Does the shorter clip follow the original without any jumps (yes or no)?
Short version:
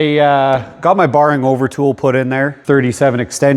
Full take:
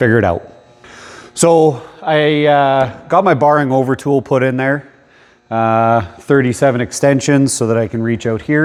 no